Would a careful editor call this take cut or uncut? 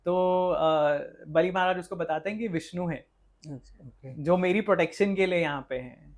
uncut